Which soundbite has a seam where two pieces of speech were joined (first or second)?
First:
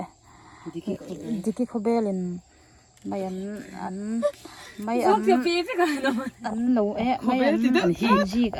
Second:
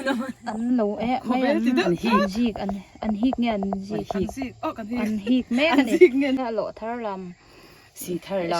second